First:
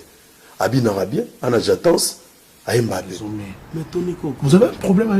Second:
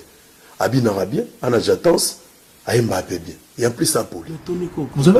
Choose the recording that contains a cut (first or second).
first